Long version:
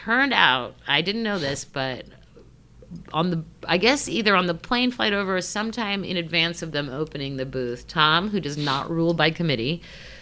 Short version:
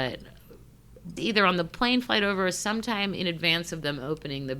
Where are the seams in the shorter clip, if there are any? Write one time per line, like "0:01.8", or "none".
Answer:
0:01.2